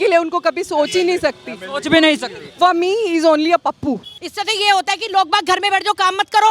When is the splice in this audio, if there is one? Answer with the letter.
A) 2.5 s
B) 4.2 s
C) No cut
B